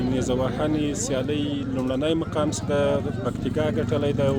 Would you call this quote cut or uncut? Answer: uncut